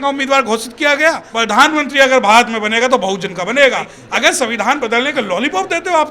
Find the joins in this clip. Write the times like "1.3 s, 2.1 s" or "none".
1.3 s, 3.9 s